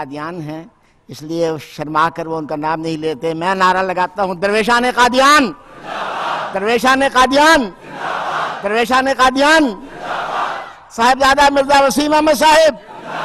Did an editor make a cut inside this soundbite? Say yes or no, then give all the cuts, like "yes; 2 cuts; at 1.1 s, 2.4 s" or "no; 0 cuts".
no; 0 cuts